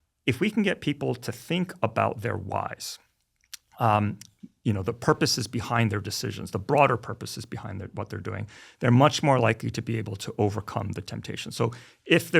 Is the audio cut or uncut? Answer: uncut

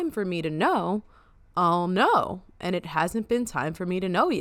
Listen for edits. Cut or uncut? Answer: uncut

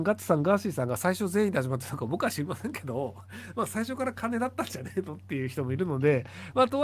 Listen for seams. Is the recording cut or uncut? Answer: uncut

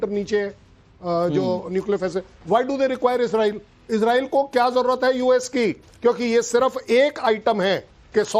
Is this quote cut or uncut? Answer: cut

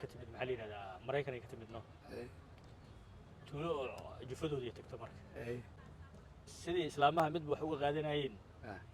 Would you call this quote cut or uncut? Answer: uncut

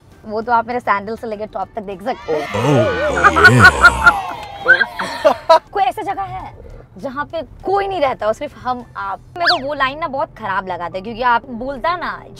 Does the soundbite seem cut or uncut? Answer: cut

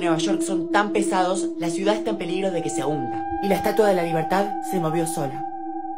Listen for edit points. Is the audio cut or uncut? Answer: uncut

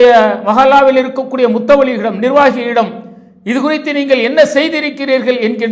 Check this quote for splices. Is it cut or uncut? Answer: uncut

